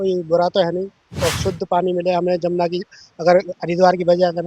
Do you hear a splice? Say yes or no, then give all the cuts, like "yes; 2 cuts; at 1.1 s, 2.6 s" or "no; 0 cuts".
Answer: yes; 1 cut; at 1.1 s